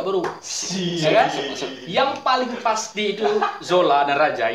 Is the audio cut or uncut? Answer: uncut